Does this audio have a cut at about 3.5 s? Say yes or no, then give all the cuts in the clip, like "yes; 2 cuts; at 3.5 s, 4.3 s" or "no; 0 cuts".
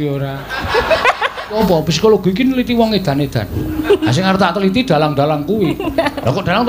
no; 1 cut; at 1.6 s